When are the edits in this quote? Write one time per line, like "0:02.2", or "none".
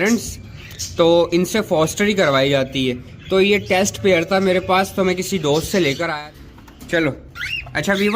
0:06.1